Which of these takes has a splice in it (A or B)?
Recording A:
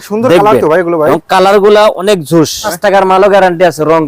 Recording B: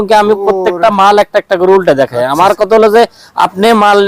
A